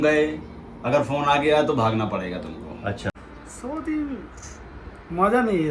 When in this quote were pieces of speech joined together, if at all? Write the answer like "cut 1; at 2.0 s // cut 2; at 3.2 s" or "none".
cut 1; at 3.2 s